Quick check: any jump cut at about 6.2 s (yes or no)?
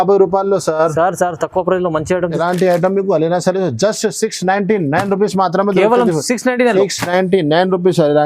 no